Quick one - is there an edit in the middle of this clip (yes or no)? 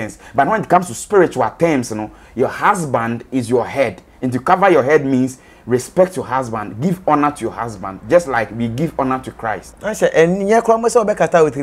yes